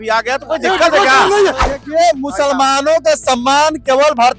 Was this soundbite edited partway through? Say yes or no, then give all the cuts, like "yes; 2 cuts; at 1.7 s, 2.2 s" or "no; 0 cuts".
yes; 1 cut; at 1.6 s